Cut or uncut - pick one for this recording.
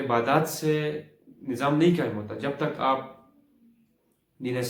uncut